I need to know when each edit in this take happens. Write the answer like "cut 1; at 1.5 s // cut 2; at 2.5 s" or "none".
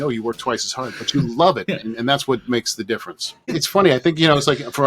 cut 1; at 3.6 s